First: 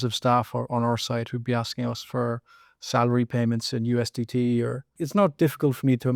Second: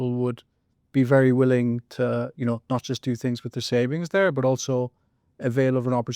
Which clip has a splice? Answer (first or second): first